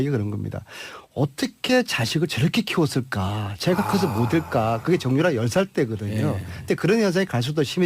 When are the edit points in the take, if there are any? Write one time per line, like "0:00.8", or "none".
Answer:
0:01.9